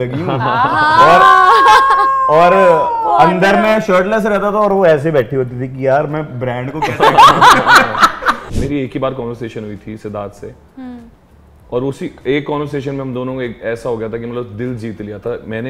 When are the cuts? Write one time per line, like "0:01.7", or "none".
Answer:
0:08.4